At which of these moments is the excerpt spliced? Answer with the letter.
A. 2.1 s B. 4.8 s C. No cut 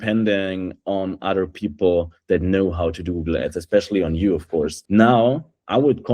B